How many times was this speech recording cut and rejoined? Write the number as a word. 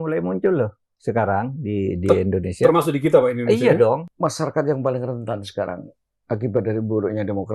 one